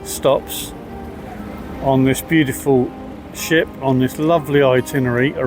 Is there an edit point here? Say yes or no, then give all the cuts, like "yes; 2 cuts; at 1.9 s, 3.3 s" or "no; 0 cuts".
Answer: no; 0 cuts